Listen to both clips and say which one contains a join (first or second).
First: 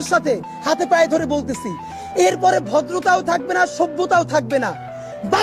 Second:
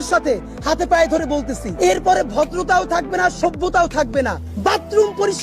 second